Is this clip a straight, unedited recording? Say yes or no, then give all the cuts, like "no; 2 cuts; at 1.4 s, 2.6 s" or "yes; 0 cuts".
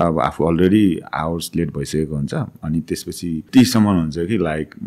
no; 1 cut; at 3.5 s